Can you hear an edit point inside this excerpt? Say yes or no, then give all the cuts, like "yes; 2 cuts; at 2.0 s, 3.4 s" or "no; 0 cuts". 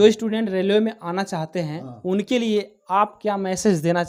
no; 0 cuts